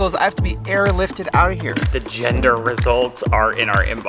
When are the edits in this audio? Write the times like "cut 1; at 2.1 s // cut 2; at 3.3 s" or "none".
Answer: cut 1; at 1.8 s